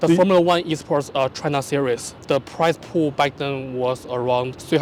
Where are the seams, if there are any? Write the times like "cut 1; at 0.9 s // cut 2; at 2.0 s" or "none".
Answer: none